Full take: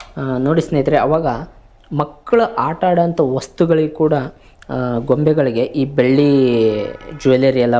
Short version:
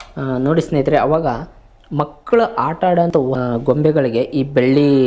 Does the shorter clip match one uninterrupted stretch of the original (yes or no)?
no